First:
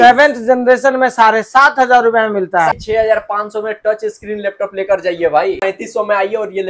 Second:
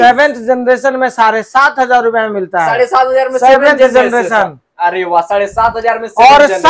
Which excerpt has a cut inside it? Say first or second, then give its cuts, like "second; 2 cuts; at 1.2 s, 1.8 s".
first; 2 cuts; at 2.7 s, 5.6 s